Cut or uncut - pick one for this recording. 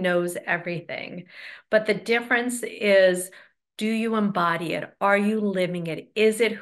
uncut